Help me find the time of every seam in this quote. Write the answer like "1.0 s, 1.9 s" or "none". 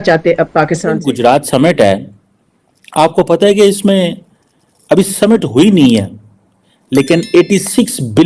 1.0 s